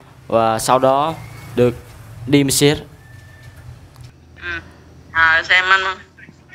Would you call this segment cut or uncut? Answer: cut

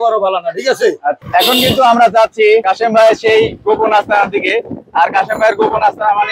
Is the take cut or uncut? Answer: cut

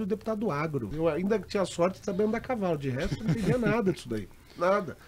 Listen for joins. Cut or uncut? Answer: cut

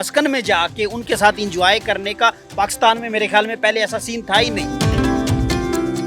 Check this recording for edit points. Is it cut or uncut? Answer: cut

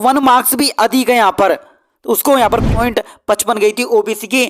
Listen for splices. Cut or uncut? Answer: cut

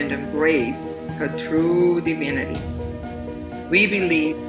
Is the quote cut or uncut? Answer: uncut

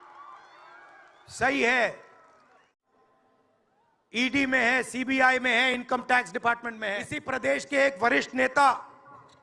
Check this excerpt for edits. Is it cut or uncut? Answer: cut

